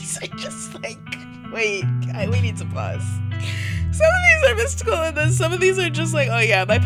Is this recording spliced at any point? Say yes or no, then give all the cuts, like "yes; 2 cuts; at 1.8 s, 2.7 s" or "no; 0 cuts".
no; 0 cuts